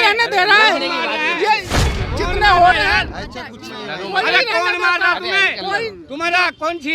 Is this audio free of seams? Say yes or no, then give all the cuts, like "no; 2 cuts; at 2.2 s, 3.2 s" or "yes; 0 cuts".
yes; 0 cuts